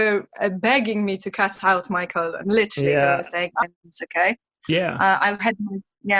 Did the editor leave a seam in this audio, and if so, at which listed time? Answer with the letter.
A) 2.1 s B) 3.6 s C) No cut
B